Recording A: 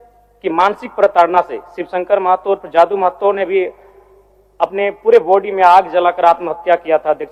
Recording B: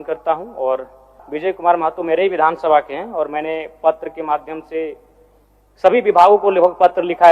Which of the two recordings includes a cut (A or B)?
B